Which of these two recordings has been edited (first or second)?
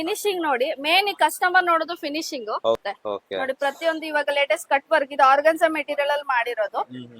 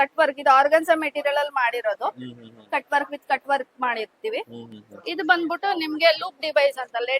first